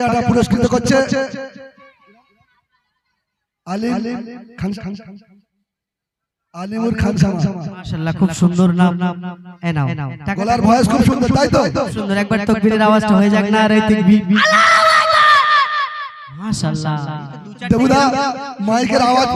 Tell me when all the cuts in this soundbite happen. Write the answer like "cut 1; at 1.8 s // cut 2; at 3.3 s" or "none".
none